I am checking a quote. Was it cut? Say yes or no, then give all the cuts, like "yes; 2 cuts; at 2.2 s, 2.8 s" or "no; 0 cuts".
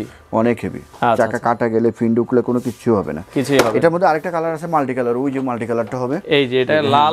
no; 0 cuts